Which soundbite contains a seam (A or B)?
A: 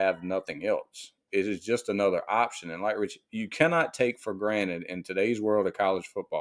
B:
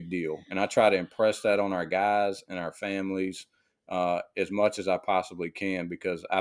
A